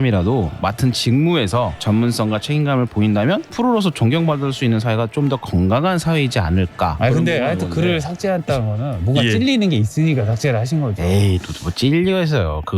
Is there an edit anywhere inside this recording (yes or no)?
yes